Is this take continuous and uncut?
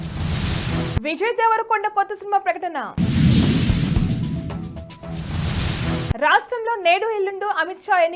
yes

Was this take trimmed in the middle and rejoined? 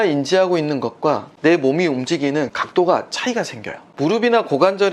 yes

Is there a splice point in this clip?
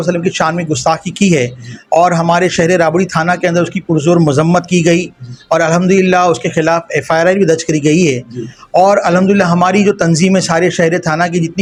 no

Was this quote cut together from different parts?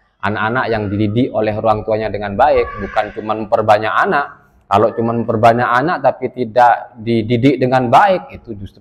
no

